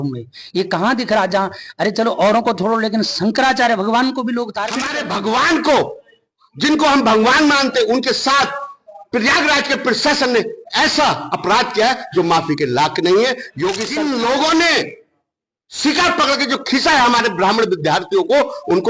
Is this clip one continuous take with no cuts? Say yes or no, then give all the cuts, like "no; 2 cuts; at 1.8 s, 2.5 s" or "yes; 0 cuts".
no; 2 cuts; at 4.9 s, 13.8 s